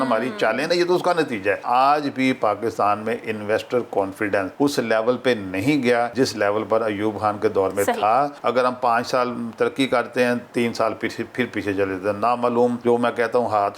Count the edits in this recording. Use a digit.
5